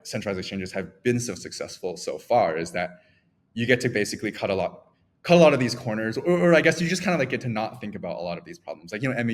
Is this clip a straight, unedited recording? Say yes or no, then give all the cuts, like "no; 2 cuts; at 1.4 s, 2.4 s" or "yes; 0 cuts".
yes; 0 cuts